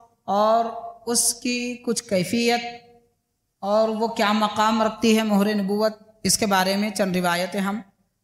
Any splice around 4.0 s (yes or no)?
no